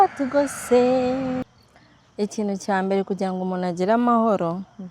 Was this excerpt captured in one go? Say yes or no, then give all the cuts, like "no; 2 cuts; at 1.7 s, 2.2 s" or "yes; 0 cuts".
no; 1 cut; at 1.5 s